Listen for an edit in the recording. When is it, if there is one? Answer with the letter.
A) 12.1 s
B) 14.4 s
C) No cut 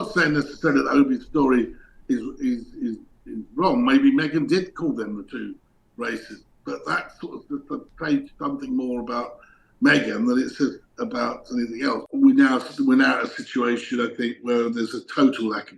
A